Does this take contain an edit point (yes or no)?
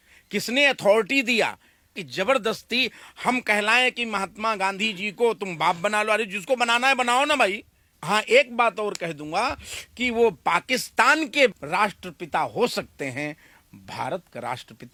no